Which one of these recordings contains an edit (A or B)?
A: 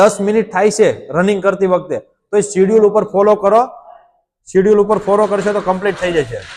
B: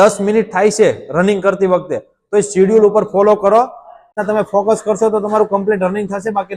B